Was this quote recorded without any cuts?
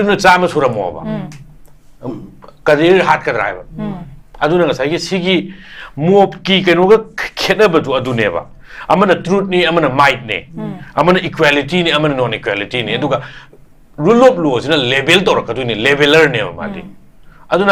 yes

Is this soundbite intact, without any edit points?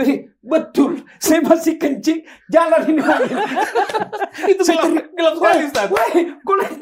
yes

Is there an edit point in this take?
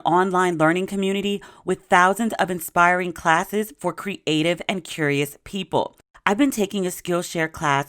yes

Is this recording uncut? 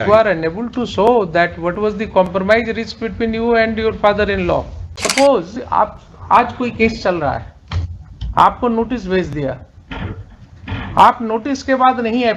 no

